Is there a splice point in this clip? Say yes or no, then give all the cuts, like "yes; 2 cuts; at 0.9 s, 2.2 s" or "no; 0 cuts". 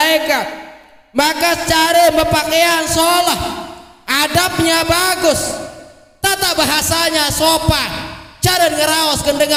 no; 0 cuts